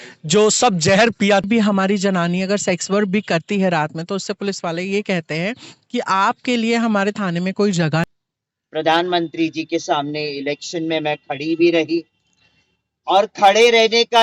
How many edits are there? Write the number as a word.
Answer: two